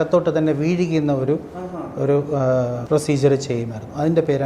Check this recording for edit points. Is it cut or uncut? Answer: cut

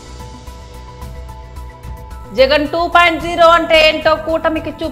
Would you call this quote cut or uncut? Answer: cut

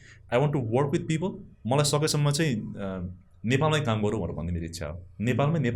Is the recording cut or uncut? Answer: uncut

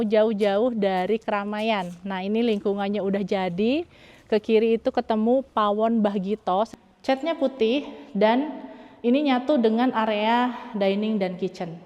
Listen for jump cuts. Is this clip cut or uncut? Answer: cut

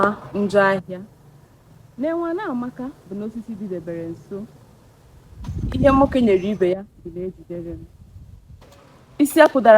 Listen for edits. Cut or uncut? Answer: uncut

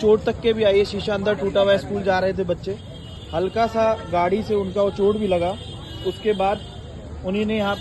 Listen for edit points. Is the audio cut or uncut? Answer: uncut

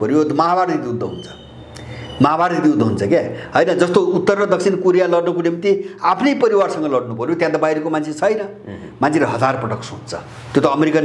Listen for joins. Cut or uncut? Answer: uncut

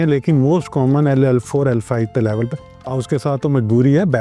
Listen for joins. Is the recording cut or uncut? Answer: cut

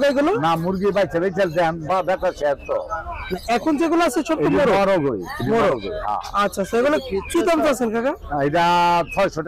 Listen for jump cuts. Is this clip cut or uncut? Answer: uncut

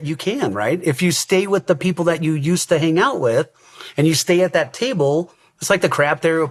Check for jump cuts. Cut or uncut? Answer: uncut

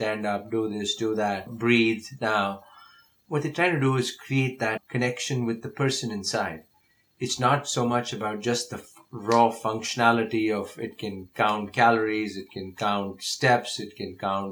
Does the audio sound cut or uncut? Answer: uncut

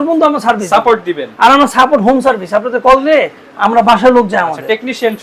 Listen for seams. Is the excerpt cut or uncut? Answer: uncut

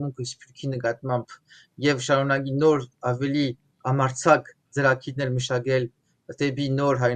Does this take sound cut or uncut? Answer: uncut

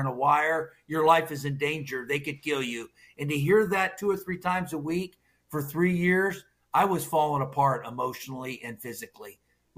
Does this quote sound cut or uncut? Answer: uncut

